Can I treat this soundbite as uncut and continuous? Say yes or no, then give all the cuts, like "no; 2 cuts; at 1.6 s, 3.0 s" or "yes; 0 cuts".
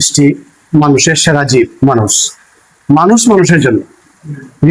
yes; 0 cuts